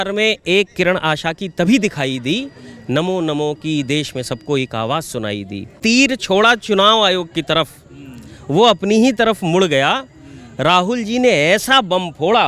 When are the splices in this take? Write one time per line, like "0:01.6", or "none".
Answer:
0:05.7